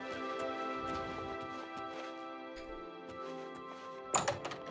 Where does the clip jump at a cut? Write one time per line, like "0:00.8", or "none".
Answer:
none